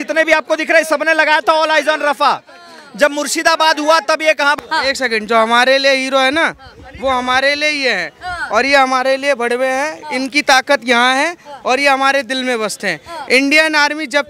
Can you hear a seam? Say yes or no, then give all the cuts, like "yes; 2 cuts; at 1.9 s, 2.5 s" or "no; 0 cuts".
yes; 1 cut; at 4.6 s